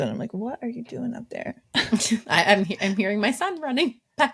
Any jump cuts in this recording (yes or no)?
no